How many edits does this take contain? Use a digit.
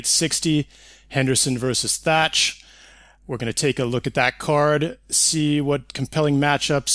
1